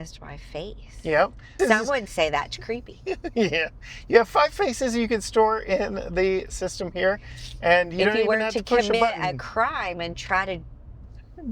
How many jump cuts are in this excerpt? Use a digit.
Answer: 1